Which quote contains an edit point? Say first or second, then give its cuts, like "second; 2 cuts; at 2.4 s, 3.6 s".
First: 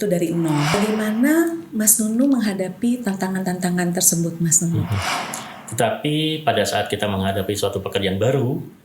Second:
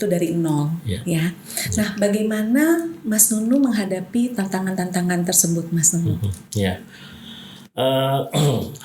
first; 2 cuts; at 0.7 s, 5.0 s